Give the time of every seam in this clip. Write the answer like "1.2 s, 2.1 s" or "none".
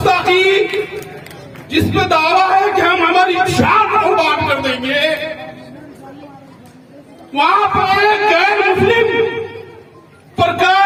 none